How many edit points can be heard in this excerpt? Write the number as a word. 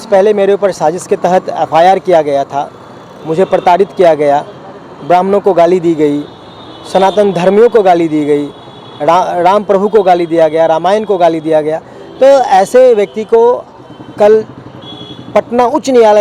zero